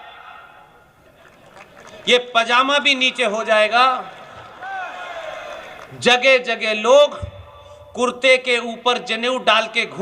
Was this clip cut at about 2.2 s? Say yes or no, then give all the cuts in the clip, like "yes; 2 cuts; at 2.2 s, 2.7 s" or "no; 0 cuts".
no; 1 cut; at 4.4 s